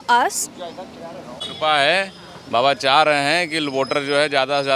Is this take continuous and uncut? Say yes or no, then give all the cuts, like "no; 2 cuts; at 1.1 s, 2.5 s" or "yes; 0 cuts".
no; 1 cut; at 1.4 s